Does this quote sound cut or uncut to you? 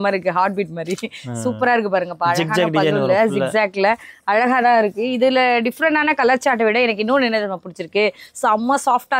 uncut